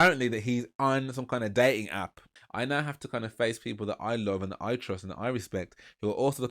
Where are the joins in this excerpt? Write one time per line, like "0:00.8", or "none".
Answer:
0:02.4